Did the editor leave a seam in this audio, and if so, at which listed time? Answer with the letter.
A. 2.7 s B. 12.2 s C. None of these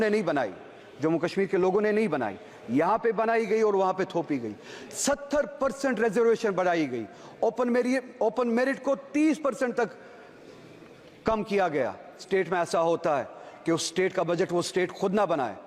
B